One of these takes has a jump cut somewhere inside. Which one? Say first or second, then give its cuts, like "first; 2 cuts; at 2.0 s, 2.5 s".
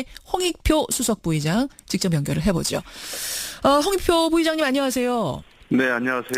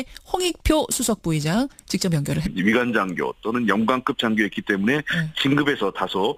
first; 1 cut; at 2.4 s